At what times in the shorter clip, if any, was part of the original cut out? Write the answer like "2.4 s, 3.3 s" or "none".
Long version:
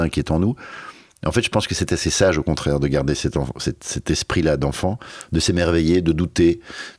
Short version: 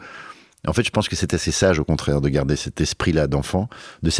2.6 s